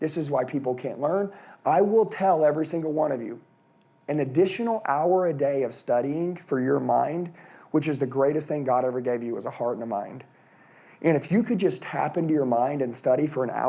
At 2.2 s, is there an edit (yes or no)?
no